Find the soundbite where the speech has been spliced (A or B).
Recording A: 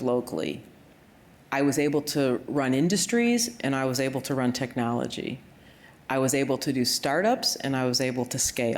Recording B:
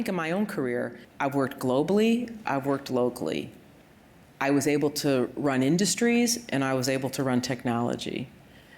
B